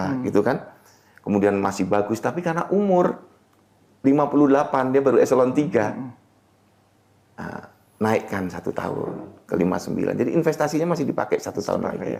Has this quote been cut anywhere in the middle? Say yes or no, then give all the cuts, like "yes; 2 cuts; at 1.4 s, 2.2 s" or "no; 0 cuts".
no; 0 cuts